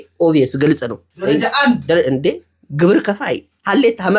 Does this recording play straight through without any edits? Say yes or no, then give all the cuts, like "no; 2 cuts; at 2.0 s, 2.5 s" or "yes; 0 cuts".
yes; 0 cuts